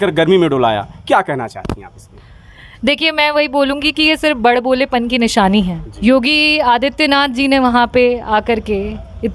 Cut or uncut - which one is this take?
cut